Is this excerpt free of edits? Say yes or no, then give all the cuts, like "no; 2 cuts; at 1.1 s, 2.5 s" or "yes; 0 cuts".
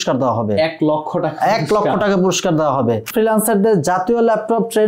no; 1 cut; at 3.1 s